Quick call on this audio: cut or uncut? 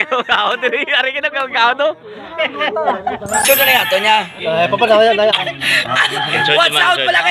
cut